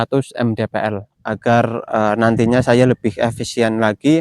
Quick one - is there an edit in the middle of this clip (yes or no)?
yes